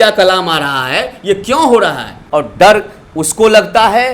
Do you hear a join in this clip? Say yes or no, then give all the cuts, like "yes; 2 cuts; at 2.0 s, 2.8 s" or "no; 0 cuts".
yes; 1 cut; at 2.2 s